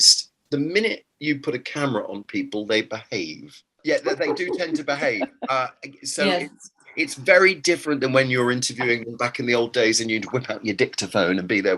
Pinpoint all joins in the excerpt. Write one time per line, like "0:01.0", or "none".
0:03.8